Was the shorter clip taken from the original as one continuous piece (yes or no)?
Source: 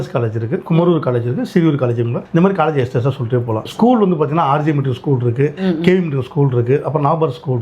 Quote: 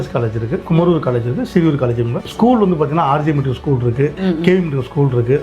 no